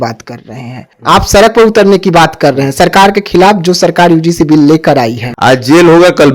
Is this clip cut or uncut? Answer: cut